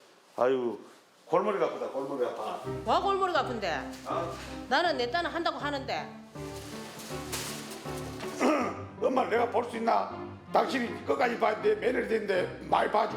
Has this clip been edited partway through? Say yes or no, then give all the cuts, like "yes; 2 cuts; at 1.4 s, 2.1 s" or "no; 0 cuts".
no; 0 cuts